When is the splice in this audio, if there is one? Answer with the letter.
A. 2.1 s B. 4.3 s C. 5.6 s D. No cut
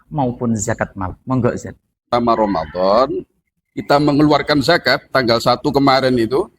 A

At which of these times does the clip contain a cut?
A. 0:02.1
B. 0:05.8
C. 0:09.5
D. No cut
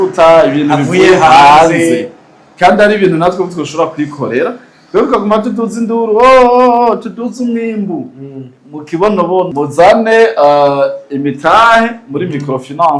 C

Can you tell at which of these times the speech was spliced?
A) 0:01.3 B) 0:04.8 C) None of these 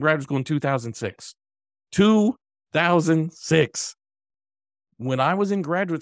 C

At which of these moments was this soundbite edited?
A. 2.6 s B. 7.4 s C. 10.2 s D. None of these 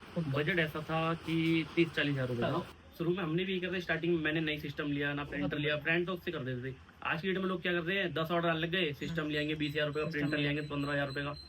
A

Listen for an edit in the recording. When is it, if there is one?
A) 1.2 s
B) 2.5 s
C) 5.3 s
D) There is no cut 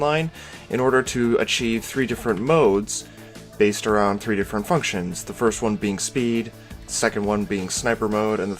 A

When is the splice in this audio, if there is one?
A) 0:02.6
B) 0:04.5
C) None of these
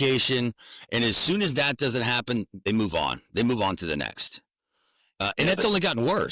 A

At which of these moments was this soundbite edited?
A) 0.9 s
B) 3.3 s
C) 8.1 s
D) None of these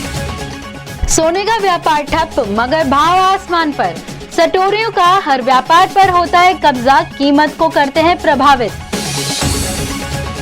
A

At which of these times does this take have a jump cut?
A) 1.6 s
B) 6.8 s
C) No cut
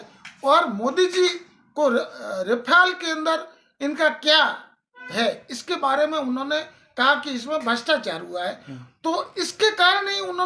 C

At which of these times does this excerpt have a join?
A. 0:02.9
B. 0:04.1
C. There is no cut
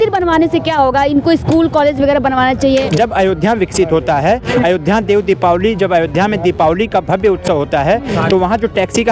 A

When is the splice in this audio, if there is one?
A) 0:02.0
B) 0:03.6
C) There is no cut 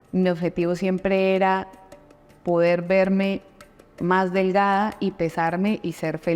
C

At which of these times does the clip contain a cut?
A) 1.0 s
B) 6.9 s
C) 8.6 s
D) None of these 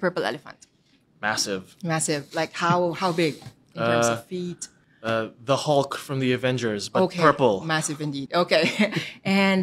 A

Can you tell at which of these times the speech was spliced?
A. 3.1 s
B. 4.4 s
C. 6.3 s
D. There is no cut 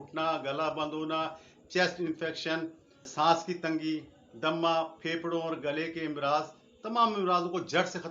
A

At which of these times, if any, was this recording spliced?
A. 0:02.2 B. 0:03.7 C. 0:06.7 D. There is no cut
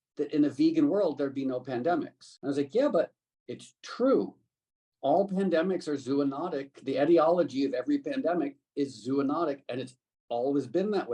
A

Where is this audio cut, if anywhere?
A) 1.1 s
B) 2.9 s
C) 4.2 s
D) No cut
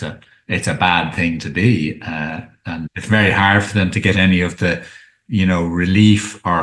B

